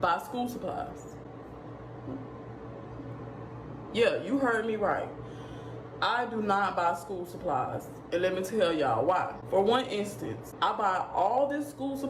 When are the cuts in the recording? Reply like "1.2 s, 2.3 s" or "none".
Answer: none